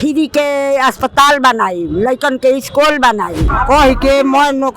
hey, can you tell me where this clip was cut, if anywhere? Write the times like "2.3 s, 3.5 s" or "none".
3.5 s